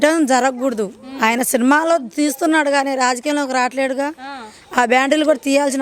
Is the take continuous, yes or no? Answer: yes